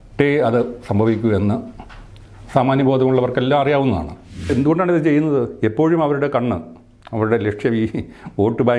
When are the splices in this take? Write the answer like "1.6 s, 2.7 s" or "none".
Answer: 4.5 s